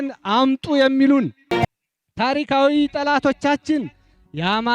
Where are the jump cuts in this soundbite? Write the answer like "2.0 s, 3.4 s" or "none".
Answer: 1.7 s